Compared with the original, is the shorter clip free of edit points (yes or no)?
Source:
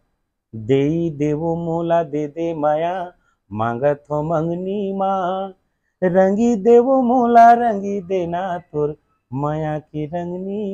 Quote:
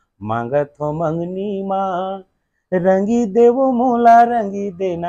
yes